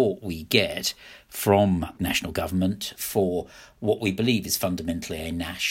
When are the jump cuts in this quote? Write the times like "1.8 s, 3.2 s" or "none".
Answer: 1.9 s, 2.9 s